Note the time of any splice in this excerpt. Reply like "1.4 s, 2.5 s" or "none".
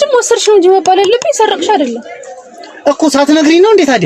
none